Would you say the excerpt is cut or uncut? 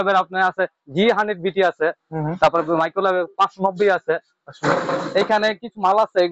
uncut